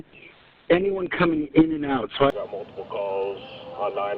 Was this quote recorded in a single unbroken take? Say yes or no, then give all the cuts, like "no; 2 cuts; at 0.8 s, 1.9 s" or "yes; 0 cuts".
no; 1 cut; at 2.3 s